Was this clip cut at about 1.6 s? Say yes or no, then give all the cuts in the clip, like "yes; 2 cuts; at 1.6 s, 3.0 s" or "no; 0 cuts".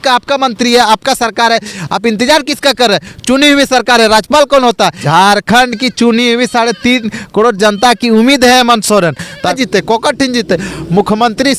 no; 2 cuts; at 5.0 s, 9.5 s